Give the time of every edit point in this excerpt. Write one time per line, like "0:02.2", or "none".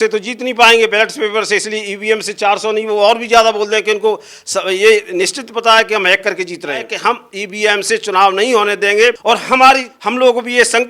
0:06.9
0:09.2
0:10.0